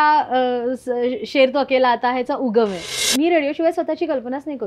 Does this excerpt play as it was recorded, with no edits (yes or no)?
no